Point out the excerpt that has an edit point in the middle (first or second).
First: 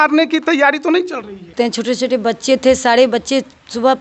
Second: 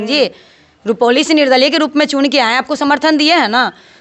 first